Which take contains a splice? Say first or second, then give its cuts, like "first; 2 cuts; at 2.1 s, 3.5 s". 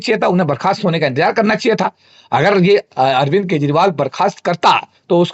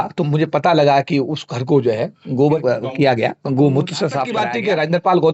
second; 2 cuts; at 2.6 s, 4.5 s